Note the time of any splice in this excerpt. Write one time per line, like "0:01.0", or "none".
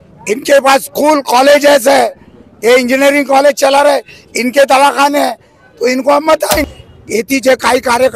0:06.7